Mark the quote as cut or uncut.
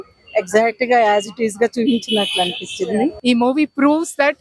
cut